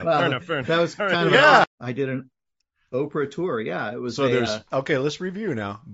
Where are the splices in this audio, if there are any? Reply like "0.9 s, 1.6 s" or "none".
1.7 s